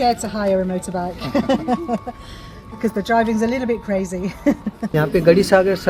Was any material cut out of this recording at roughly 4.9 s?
yes; 1 cut; at 4.9 s

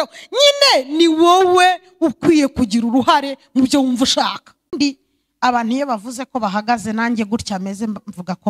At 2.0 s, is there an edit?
no; 1 cut; at 4.7 s

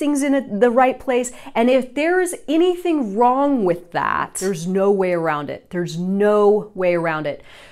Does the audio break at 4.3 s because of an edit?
yes; 1 cut; at 4.3 s

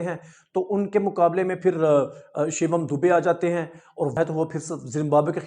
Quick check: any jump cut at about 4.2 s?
yes; 1 cut; at 4.2 s

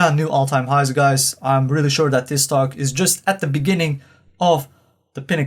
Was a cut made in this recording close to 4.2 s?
no; 0 cuts

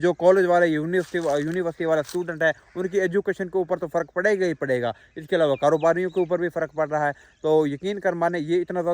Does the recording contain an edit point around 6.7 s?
no; 0 cuts

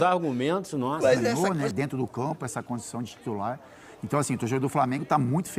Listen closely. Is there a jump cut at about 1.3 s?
yes; 1 cut; at 1.3 s

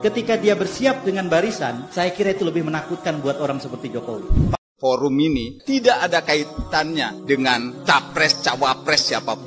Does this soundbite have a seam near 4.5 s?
yes; 1 cut; at 4.5 s

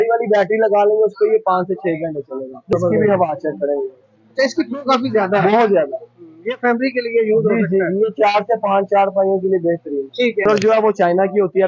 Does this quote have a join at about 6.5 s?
no; 2 cuts; at 2.6 s, 10.4 s

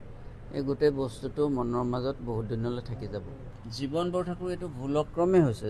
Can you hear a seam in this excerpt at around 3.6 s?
yes; 1 cut; at 3.6 s

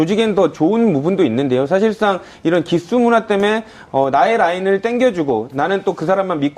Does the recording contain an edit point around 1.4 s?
no; 1 cut; at 4.9 s

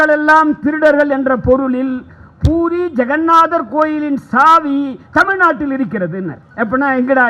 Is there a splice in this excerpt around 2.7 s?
no; 1 cut; at 6.4 s

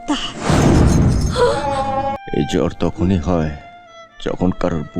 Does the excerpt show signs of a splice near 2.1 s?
yes; 1 cut; at 2.1 s

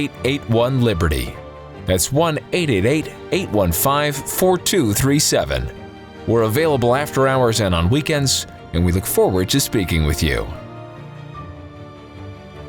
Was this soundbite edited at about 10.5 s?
no; 0 cuts

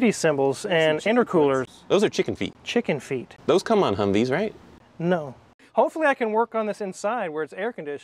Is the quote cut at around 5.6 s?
yes; 3 cuts; at 2.6 s, 3.3 s, 5.6 s

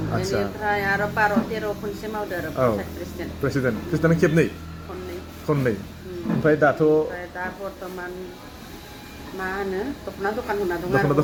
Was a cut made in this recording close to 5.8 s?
no; 0 cuts

